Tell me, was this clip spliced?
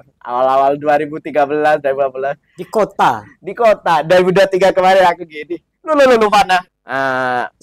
yes; 1 cut; at 6.7 s

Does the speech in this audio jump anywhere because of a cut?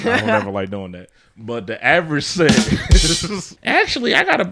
yes; 1 cut; at 3.5 s

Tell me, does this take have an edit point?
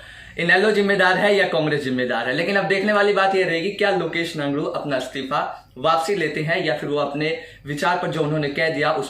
no; 0 cuts

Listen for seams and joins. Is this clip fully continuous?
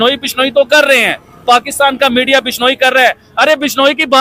yes; 0 cuts

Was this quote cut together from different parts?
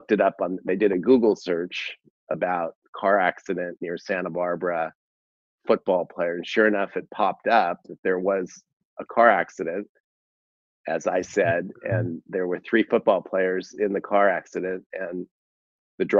no; 0 cuts

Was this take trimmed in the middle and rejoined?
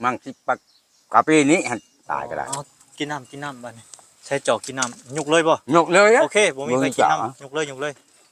yes; 1 cut; at 2.5 s

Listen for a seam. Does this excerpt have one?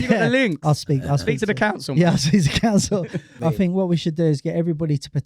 yes; 1 cut; at 3.4 s

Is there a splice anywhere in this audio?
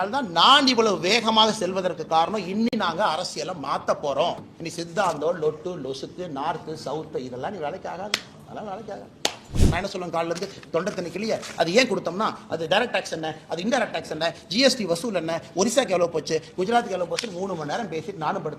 yes; 2 cuts; at 4.5 s, 9.5 s

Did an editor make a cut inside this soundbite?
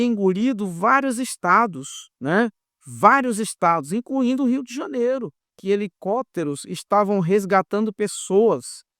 yes; 1 cut; at 5.6 s

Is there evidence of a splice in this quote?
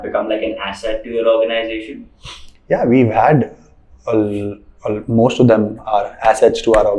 no; 0 cuts

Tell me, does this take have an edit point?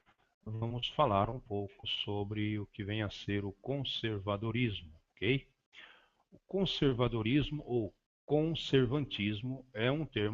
no; 0 cuts

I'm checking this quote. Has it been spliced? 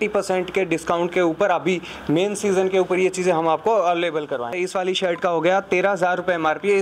yes; 1 cut; at 4.5 s

